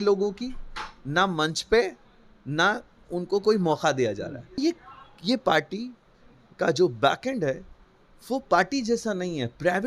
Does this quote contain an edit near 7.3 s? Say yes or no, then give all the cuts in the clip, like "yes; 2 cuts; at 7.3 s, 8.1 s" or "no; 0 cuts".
no; 1 cut; at 4.6 s